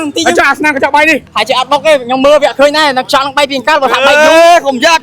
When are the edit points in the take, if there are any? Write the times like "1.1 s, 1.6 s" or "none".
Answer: 1.3 s